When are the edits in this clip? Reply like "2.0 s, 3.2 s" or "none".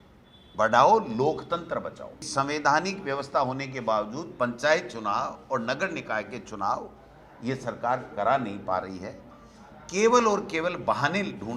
2.3 s